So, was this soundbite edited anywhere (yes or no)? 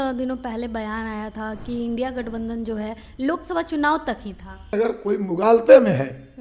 yes